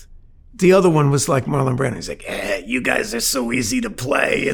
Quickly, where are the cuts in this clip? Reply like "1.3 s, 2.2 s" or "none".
none